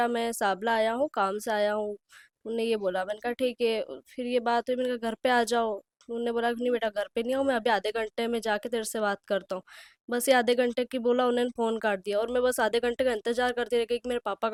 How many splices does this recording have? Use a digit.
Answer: 0